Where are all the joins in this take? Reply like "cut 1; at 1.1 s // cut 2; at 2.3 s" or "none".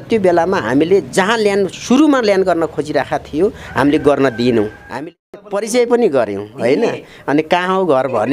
cut 1; at 5.2 s